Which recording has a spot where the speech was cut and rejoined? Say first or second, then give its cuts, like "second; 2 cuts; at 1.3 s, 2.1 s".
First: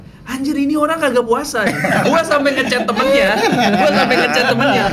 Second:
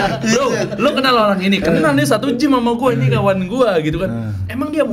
first; 1 cut; at 2.0 s